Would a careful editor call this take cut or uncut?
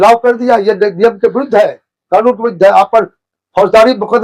uncut